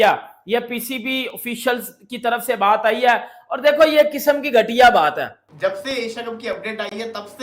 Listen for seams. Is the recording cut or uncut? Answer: cut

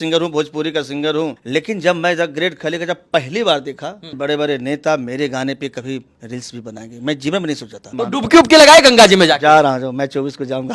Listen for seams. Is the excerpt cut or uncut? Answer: cut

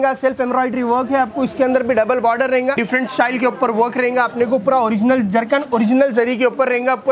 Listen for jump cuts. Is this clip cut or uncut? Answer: cut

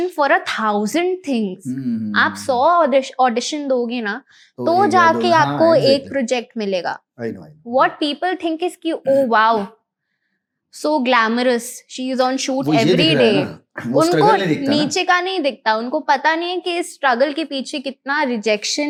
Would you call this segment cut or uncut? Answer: uncut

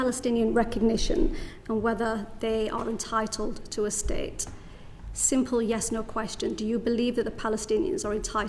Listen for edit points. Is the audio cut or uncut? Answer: uncut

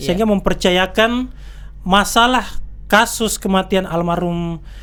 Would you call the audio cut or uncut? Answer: uncut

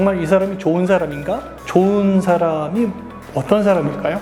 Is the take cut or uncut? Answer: uncut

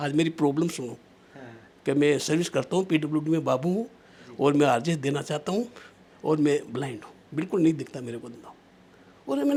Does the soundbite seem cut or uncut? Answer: uncut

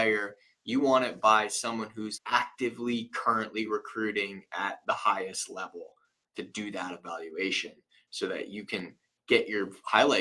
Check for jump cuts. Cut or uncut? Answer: cut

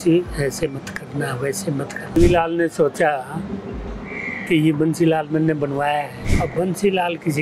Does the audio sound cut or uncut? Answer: cut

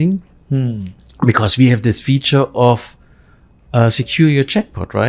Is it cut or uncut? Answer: uncut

